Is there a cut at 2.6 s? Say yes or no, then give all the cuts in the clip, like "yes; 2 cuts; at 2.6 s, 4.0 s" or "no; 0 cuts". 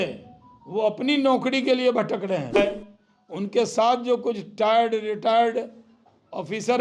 yes; 1 cut; at 2.6 s